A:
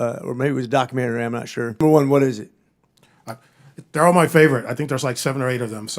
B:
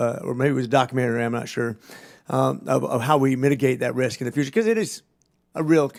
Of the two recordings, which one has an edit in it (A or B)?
A